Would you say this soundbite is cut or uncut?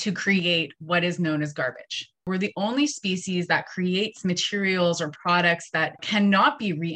cut